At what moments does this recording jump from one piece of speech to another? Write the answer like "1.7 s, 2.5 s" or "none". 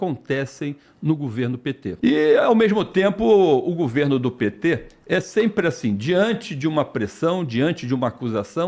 1.9 s